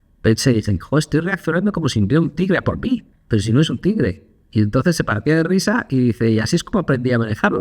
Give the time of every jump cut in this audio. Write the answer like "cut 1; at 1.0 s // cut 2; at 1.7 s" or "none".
cut 1; at 3.1 s